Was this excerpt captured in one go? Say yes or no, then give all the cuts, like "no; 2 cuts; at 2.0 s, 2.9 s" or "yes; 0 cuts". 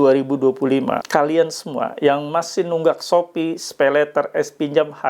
no; 1 cut; at 1.0 s